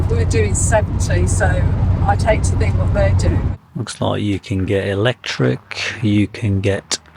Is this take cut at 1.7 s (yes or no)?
no